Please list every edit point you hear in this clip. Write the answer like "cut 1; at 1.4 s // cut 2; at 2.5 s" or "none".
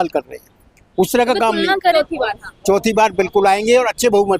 cut 1; at 1.9 s